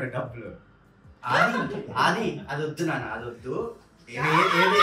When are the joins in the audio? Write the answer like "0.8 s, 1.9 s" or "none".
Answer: 1.1 s